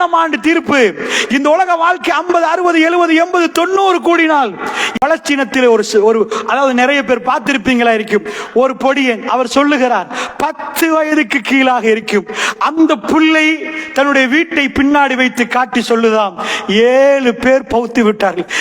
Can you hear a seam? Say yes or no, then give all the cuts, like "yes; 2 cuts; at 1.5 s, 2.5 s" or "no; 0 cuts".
yes; 1 cut; at 4.8 s